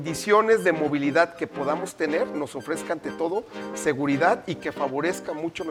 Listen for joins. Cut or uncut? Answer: uncut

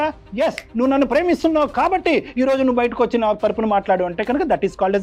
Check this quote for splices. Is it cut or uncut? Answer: uncut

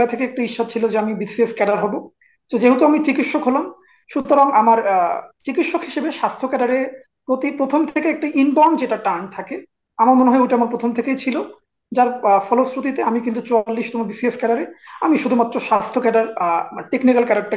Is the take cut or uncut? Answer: uncut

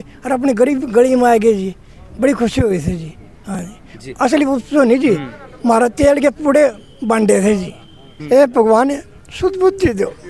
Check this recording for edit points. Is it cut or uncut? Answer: cut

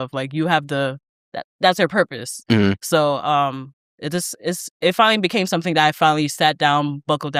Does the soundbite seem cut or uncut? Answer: uncut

